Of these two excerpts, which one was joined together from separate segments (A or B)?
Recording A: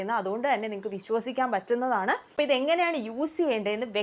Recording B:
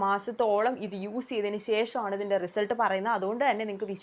A